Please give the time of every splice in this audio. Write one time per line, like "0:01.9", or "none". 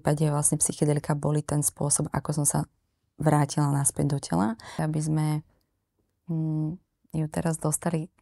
0:04.7